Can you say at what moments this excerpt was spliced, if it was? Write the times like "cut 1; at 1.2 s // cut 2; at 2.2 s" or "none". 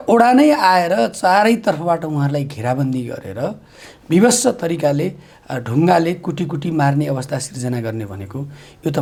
none